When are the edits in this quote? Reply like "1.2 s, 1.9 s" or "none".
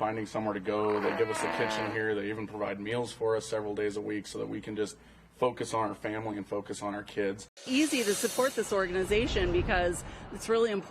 7.6 s

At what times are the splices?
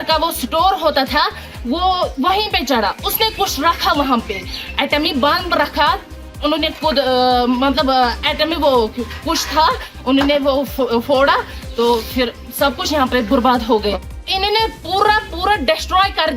6.4 s, 13.9 s

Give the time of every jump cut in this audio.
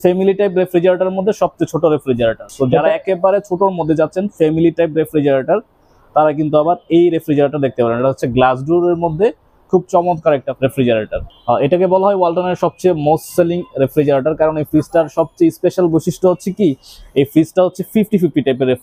2.5 s, 11.2 s

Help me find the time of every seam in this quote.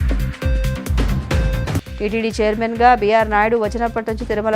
1.6 s

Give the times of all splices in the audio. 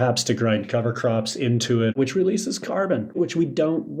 1.9 s, 3.2 s

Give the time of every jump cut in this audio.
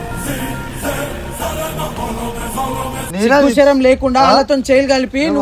3.0 s

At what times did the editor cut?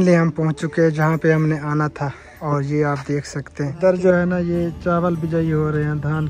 3.8 s

